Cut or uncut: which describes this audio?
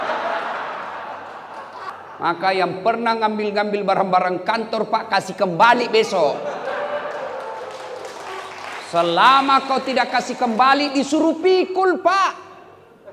cut